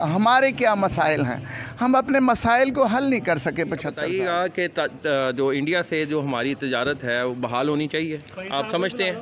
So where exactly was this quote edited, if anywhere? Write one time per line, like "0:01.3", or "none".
0:04.0